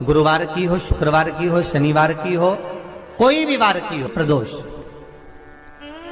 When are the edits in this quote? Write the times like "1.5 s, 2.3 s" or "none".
4.1 s